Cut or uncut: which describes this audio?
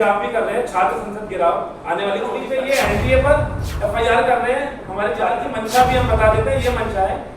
cut